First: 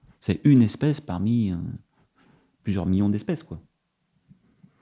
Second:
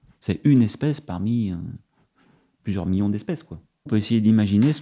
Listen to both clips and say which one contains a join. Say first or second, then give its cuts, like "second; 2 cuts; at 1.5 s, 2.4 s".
second; 1 cut; at 3.9 s